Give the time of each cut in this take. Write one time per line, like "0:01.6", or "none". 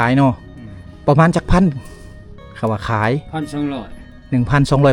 none